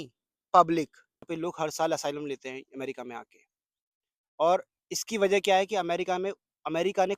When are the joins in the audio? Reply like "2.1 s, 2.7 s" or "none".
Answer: 1.3 s